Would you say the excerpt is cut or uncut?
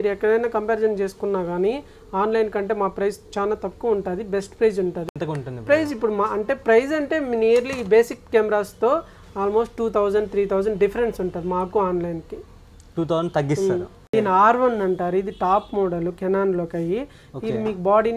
cut